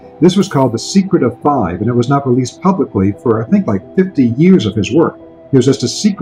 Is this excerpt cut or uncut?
uncut